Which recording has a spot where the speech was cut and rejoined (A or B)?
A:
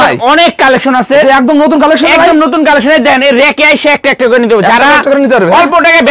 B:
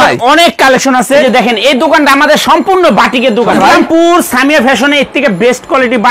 B